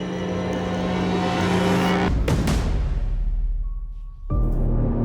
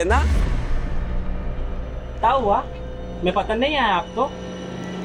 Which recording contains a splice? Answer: first; 1 cut; at 2.1 s

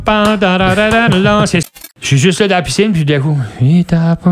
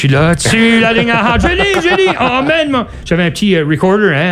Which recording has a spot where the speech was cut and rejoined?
first; 1 cut; at 1.6 s

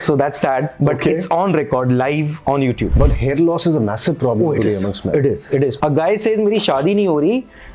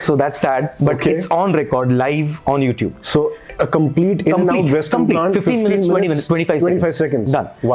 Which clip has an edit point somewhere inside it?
first; 2 cuts; at 2.9 s, 5.7 s

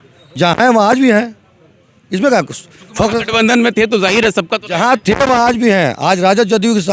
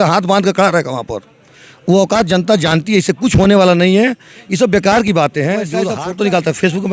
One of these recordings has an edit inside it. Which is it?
second; 1 cut; at 5.9 s

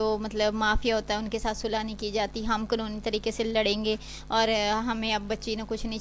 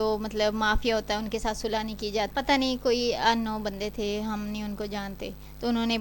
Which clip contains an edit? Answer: second; 1 cut; at 2.3 s

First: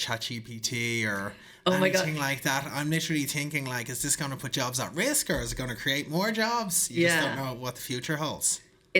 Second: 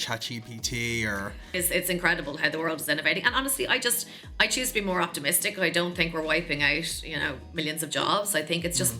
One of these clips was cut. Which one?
second; 1 cut; at 1.5 s

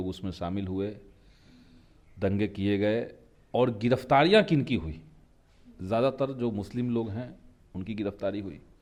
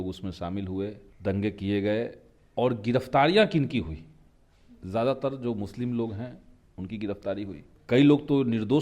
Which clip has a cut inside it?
second; 2 cuts; at 1.1 s, 7.7 s

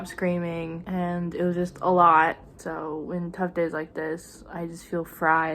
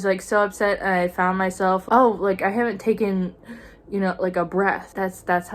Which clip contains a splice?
first; 1 cut; at 2.4 s

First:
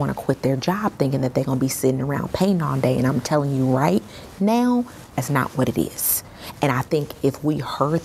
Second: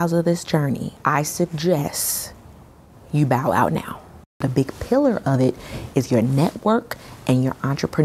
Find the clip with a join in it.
second; 2 cuts; at 0.9 s, 4.4 s

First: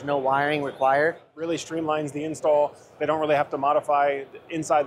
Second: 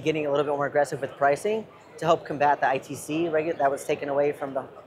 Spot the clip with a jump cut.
first; 1 cut; at 1.3 s

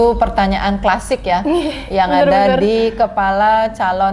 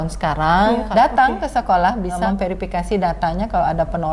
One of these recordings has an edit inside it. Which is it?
second; 2 cuts; at 0.8 s, 2.2 s

